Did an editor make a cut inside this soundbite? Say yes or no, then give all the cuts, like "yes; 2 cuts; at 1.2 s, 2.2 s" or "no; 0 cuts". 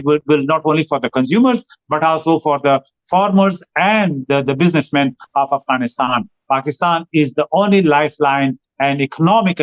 no; 0 cuts